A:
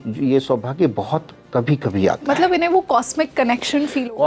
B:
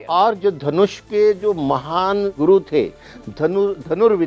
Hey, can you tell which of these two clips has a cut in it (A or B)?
B